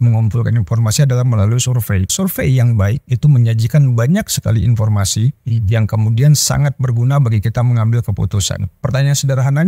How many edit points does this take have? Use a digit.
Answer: 2